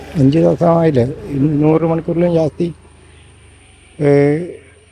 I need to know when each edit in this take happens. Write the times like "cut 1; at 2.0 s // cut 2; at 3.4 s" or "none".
none